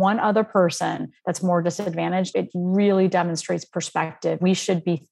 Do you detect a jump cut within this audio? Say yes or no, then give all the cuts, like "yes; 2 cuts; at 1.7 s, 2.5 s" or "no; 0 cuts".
yes; 2 cuts; at 2.3 s, 4.4 s